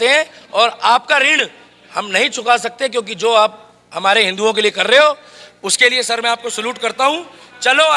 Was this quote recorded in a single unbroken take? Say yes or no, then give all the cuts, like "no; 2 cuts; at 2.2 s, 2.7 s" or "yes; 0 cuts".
yes; 0 cuts